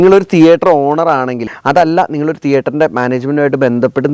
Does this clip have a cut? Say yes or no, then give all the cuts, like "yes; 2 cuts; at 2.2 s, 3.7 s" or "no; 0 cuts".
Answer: yes; 1 cut; at 1.5 s